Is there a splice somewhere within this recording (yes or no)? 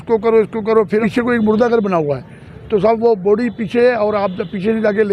yes